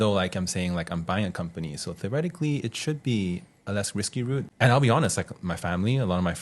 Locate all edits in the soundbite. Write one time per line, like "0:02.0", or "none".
0:04.5